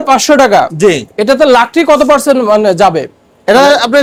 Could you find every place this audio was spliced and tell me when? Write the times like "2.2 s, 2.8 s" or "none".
none